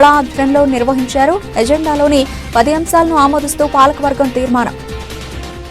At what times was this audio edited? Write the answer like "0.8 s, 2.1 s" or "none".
4.7 s